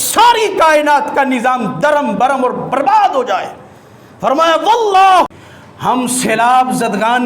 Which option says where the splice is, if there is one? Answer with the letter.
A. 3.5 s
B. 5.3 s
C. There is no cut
B